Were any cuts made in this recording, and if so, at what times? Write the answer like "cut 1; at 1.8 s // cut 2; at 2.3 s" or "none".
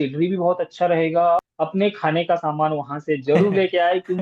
cut 1; at 1.4 s